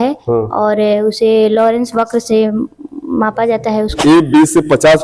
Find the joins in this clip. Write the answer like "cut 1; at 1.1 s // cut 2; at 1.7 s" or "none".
cut 1; at 4.0 s